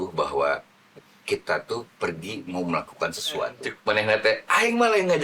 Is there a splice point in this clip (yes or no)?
yes